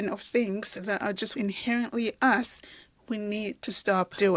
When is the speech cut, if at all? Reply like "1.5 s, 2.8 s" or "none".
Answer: none